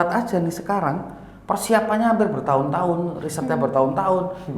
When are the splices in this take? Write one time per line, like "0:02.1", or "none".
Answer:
none